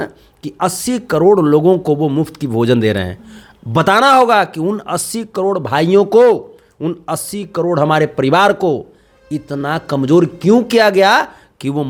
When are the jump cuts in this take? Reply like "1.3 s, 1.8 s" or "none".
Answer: none